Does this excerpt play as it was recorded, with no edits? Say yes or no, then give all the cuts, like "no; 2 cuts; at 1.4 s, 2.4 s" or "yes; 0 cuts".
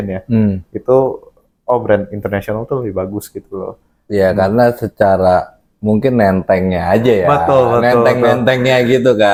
yes; 0 cuts